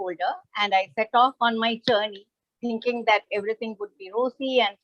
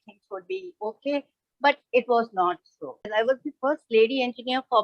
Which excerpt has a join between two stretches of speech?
second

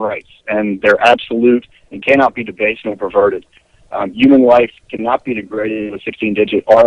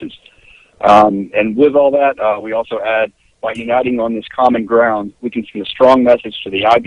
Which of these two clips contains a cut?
second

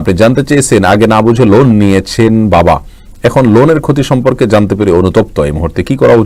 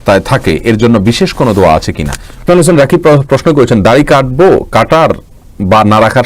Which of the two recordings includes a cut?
second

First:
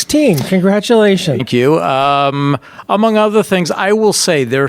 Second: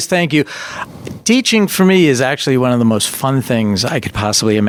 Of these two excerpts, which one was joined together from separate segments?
first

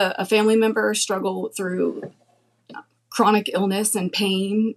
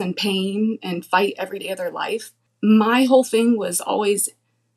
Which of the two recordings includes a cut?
second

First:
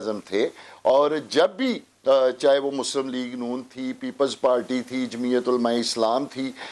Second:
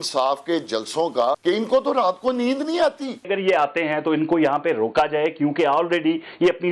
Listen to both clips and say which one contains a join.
second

